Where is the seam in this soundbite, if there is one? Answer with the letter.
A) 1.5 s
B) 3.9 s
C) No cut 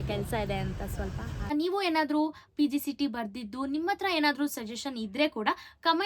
A